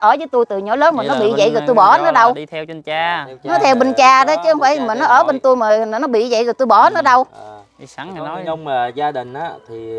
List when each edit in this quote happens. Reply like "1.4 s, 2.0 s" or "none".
none